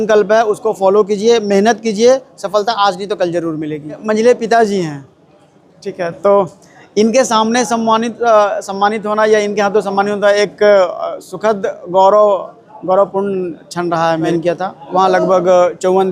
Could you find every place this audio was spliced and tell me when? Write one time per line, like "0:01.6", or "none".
0:04.0
0:14.3